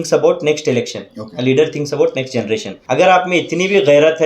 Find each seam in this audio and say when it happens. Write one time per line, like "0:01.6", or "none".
0:02.7